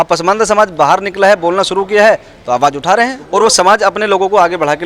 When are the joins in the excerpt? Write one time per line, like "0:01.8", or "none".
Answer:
0:03.2